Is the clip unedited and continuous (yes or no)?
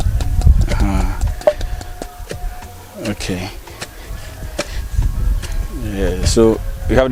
yes